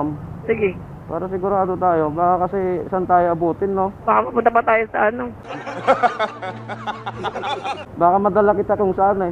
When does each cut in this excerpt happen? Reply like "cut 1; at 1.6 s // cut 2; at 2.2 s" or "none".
cut 1; at 4.0 s